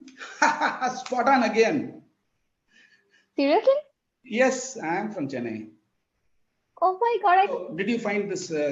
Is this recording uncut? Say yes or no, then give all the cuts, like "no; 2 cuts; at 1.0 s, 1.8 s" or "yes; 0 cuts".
no; 1 cut; at 7.6 s